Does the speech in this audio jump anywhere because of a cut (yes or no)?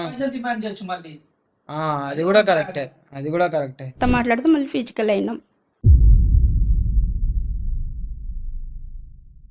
yes